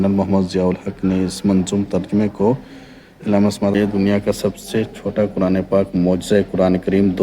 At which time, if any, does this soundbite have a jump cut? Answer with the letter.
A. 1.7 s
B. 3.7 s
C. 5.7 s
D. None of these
B